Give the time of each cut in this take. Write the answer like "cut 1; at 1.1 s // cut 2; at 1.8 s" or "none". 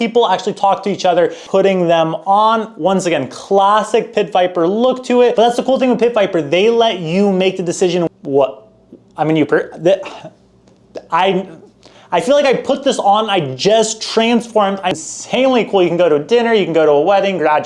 cut 1; at 1.4 s // cut 2; at 5.3 s // cut 3; at 8.1 s // cut 4; at 15.0 s